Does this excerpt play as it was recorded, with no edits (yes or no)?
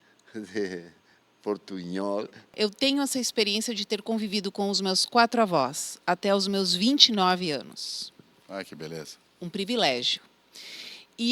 no